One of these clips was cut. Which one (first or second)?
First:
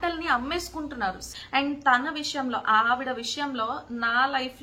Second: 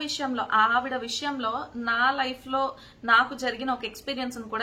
first